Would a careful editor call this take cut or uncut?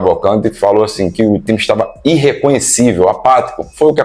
uncut